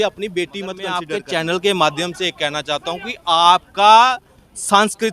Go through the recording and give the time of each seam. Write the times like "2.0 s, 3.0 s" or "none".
1.0 s